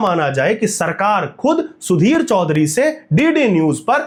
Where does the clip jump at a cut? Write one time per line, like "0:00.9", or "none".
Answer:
none